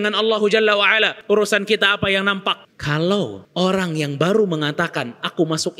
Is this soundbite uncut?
no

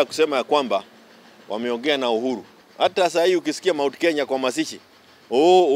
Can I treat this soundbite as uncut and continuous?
no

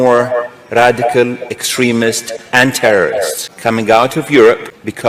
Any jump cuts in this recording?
no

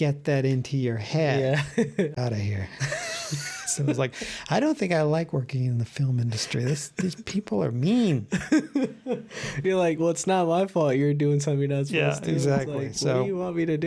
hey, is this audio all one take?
no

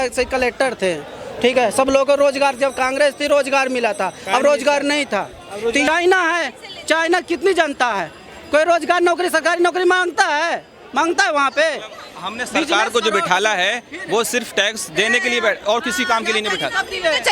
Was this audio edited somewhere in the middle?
yes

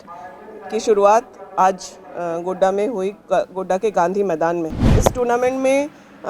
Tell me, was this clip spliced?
yes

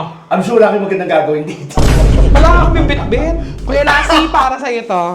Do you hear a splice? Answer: yes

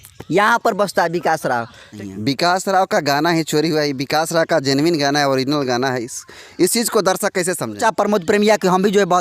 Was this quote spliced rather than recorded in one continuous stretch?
yes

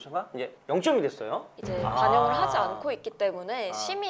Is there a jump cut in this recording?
yes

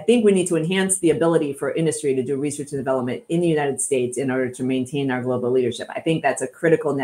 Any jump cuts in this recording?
no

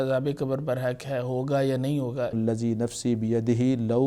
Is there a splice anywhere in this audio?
yes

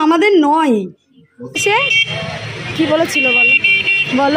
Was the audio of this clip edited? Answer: yes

